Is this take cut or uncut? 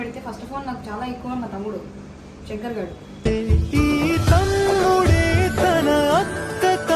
uncut